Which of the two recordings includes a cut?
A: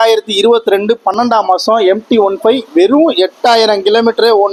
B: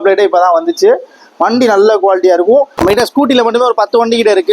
B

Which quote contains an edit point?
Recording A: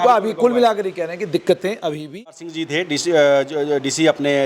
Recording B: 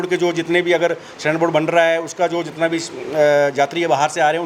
A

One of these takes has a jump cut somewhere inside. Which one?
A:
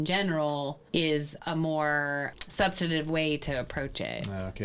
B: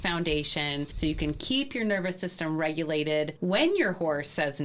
B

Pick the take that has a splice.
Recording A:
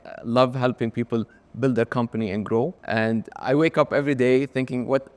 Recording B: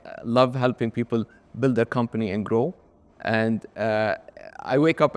A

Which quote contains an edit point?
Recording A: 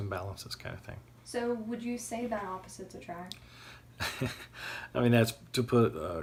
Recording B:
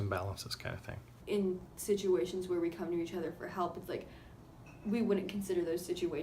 B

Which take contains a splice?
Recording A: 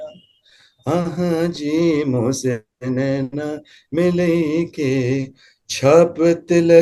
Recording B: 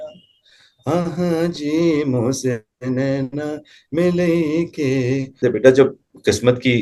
B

